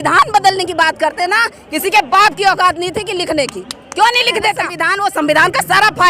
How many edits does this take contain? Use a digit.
1